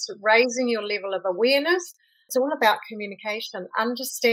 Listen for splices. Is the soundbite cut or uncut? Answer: cut